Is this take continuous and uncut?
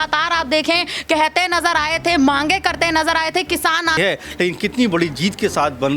no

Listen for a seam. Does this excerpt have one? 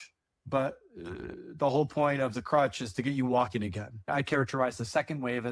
yes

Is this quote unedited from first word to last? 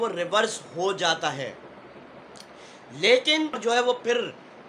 no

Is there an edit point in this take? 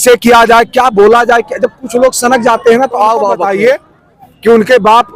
yes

